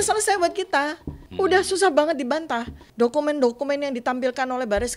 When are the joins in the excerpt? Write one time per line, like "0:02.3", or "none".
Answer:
0:01.2
0:02.8